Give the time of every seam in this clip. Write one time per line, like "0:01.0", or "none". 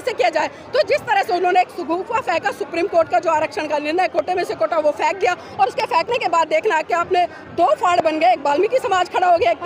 none